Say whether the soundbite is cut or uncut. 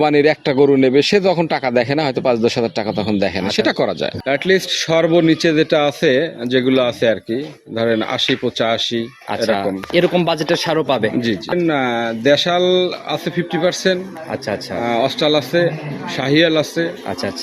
cut